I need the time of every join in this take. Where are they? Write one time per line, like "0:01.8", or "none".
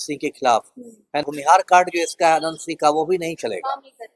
0:01.2

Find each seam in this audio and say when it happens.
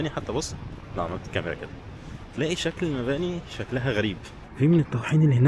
0:04.5

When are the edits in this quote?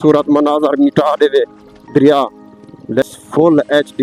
0:03.0

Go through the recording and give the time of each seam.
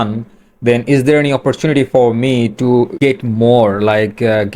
0:02.9

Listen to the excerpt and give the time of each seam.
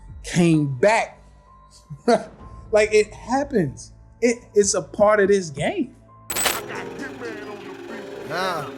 0:06.6

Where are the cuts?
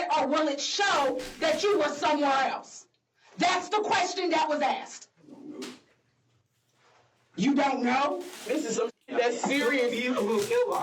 0:08.5

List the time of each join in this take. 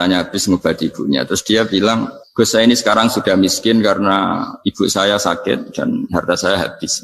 0:02.2

